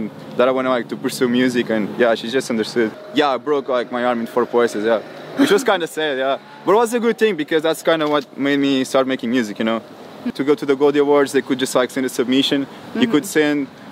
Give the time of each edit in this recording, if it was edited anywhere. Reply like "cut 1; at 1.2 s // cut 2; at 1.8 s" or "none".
cut 1; at 3.0 s // cut 2; at 10.3 s

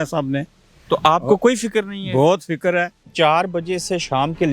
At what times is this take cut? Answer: cut 1; at 3.0 s

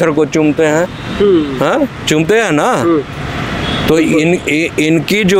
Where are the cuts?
none

